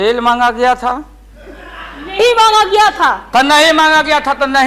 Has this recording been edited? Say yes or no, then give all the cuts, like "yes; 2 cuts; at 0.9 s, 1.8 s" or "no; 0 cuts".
no; 0 cuts